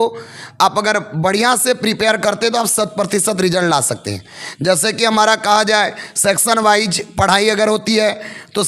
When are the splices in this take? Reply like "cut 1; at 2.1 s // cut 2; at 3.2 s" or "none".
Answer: none